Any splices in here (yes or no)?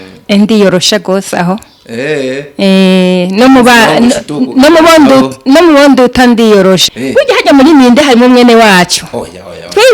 yes